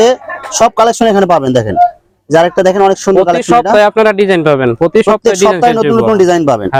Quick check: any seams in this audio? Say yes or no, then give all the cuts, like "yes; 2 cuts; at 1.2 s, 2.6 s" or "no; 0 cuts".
no; 0 cuts